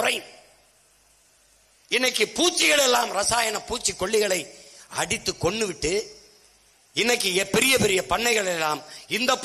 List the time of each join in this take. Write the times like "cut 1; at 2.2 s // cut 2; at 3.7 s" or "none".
none